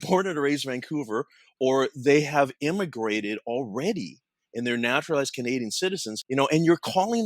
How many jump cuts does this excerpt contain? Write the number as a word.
one